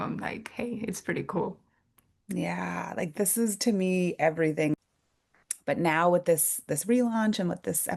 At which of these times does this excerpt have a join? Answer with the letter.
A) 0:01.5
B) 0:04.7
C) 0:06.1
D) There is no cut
B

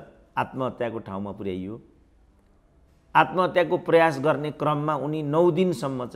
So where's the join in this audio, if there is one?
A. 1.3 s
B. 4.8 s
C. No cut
C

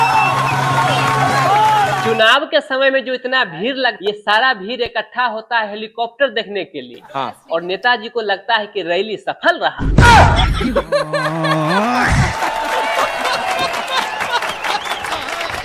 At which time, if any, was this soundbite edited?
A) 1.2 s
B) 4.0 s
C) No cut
B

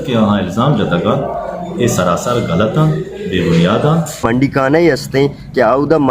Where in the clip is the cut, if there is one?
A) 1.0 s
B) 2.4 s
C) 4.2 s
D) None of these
C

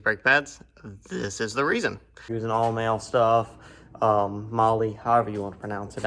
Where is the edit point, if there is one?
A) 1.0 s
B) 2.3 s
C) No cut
B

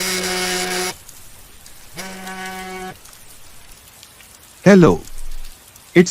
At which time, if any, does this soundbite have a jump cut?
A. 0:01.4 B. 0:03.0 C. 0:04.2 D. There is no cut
D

